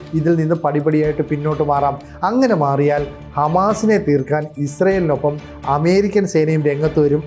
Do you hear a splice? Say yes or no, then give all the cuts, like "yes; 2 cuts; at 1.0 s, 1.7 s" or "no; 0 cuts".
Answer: no; 0 cuts